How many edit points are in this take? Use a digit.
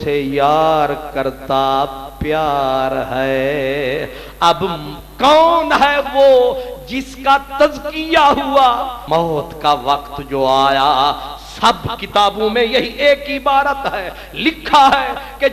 1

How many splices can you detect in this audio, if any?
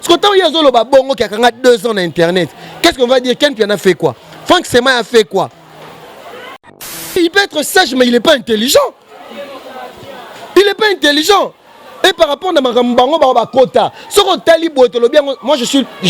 1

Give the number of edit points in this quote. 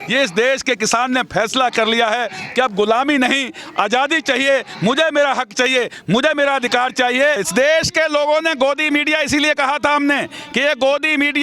1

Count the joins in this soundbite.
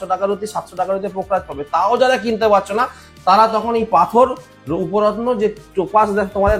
0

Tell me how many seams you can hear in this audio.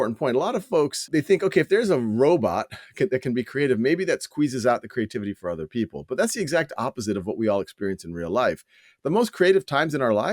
1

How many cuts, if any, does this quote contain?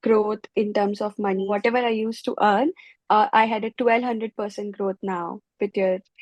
1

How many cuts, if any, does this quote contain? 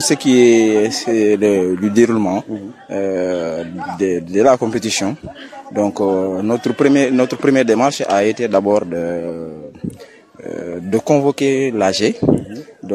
0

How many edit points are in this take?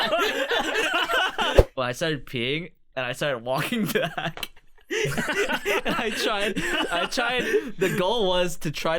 1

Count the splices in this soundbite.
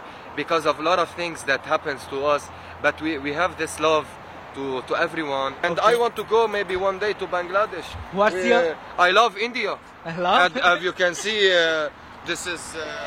1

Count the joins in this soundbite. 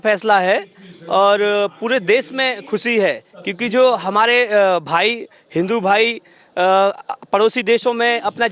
0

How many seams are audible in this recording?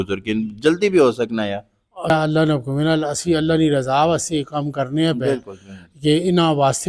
1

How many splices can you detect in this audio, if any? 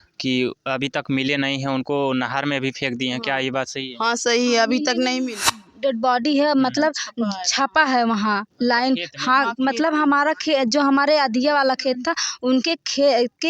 1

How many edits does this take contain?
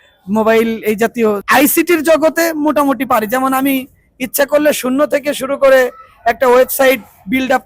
1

